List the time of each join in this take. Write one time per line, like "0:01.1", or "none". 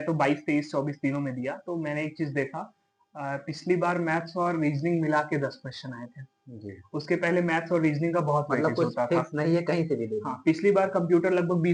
none

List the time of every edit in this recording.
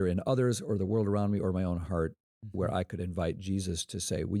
none

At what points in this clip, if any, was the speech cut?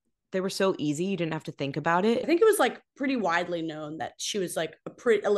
0:02.2

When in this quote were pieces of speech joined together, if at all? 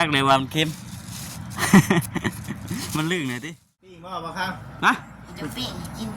0:04.1

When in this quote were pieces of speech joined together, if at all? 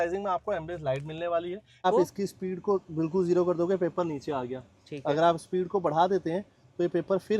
0:01.9

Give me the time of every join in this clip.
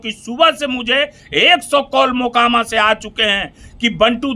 none

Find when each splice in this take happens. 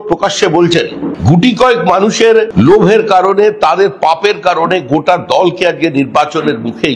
0:01.1
0:02.5

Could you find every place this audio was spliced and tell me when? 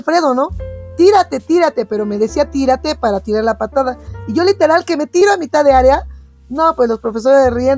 none

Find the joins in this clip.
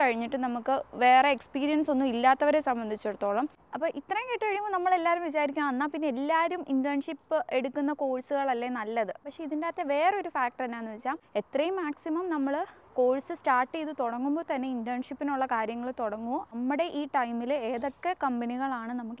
0:03.6
0:09.2
0:11.2
0:16.5

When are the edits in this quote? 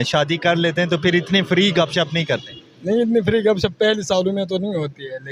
none

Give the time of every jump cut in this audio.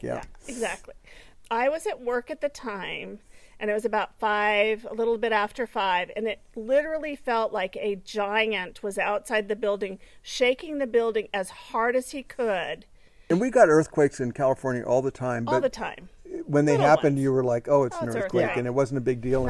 none

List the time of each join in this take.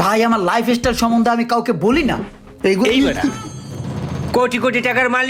none

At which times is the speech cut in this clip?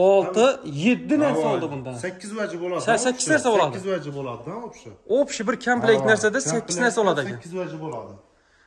none

